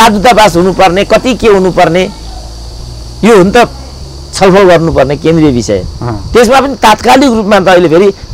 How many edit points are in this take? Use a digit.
0